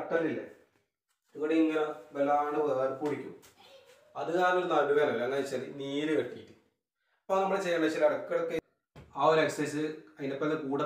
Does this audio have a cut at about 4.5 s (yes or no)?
no